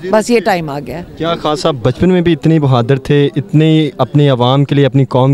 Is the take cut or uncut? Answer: uncut